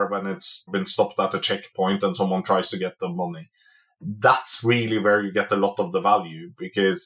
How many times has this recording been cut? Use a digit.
1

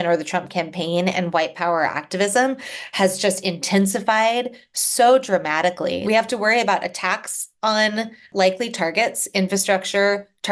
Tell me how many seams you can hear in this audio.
1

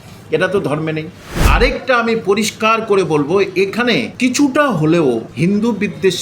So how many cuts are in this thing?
3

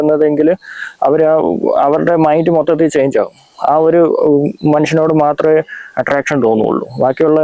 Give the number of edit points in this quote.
0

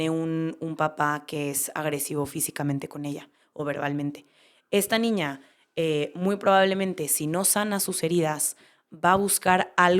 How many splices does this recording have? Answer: 0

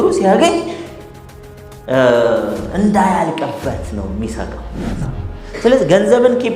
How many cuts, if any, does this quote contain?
1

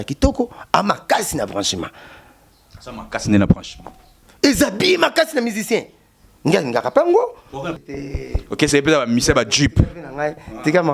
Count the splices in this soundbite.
1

